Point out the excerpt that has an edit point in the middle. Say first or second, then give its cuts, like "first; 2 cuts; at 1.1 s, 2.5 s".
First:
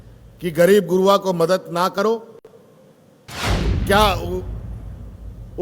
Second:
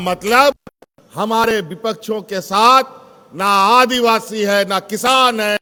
first; 1 cut; at 3.3 s